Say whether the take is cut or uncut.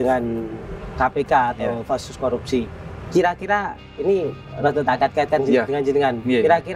uncut